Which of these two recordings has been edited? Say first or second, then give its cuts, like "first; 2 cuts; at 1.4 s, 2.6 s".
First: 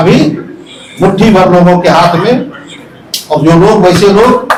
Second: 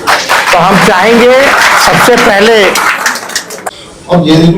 second; 1 cut; at 3.5 s